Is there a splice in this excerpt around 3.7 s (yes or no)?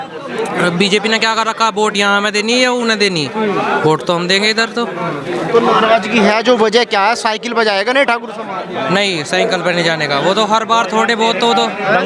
no